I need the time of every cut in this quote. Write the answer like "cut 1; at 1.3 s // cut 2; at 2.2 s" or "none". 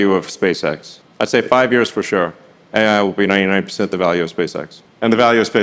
none